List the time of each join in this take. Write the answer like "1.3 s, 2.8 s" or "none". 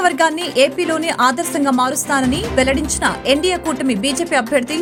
none